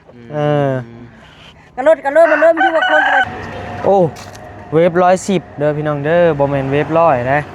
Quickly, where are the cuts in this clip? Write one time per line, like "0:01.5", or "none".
0:03.3